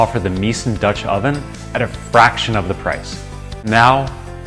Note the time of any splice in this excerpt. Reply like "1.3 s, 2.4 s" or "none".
3.5 s